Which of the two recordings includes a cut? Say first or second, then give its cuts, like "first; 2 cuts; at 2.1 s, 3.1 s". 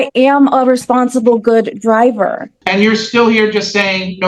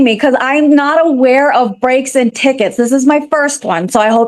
first; 1 cut; at 2.5 s